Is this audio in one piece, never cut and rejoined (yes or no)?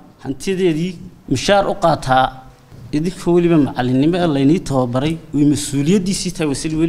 no